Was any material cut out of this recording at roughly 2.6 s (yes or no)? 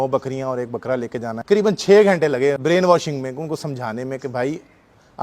yes